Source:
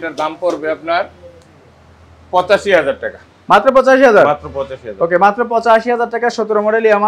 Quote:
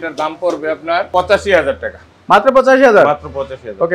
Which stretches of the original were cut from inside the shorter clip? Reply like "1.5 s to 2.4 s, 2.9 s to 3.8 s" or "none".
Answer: 1.1 s to 2.3 s